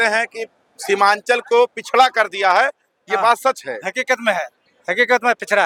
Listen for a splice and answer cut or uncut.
uncut